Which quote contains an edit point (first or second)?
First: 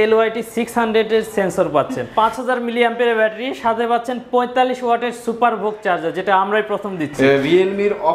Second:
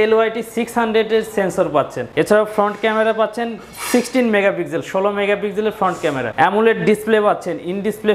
first